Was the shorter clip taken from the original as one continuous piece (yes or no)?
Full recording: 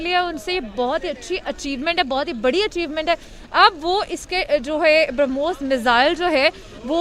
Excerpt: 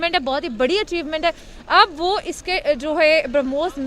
yes